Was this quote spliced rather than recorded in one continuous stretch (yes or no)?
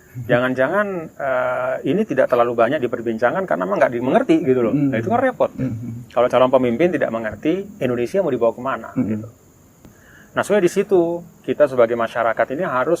yes